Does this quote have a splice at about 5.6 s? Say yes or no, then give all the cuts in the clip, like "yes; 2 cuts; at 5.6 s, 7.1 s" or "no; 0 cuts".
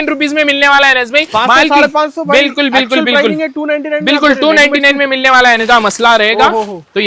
yes; 1 cut; at 5.6 s